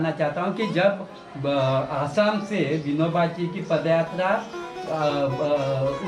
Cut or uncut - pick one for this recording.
uncut